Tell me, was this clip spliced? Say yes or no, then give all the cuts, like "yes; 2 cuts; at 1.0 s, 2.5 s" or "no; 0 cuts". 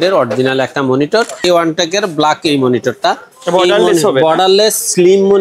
yes; 1 cut; at 1.4 s